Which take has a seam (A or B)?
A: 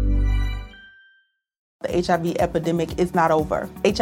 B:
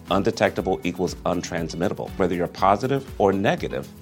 A